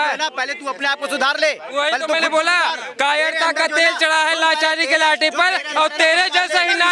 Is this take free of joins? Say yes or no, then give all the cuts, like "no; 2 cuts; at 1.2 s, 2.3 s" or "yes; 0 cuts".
yes; 0 cuts